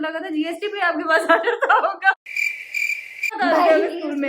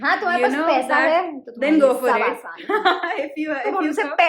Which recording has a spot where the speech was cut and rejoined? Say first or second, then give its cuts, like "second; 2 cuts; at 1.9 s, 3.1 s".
first; 1 cut; at 2.8 s